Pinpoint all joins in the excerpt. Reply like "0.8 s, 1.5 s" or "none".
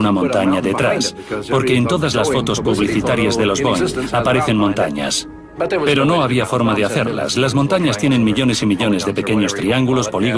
1.2 s